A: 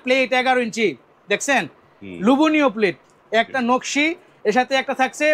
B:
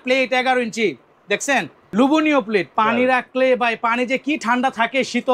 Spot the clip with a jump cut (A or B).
B